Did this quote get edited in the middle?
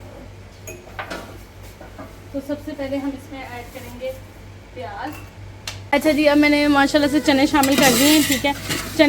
yes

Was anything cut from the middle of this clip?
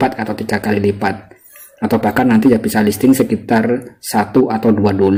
no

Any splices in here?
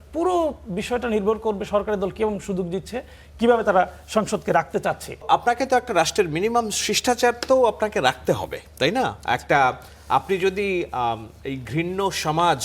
yes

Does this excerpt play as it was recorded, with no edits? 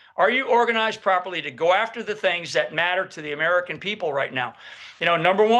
yes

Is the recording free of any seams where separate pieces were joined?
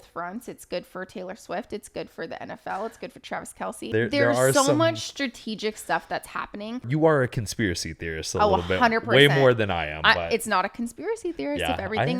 no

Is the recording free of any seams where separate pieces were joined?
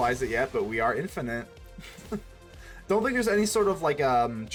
yes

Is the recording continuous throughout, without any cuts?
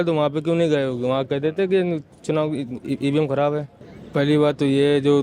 no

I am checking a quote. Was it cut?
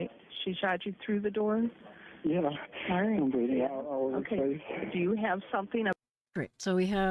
no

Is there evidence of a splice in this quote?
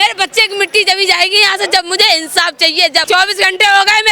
yes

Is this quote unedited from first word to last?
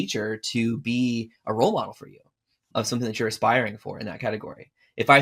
no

